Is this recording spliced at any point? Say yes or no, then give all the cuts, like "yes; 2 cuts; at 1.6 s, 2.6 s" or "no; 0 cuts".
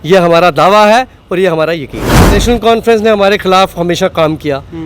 yes; 1 cut; at 2.4 s